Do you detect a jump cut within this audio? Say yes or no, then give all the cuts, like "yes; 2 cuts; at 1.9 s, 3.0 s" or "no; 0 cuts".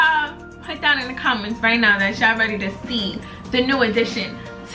no; 0 cuts